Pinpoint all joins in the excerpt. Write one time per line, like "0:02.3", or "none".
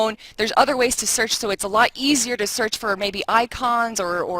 0:01.9